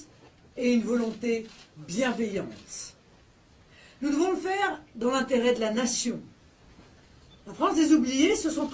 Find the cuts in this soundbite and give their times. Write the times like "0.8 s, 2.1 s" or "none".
7.8 s

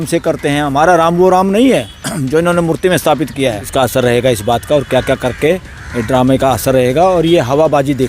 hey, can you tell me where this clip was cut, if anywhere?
3.7 s

